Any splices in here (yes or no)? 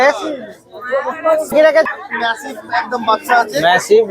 yes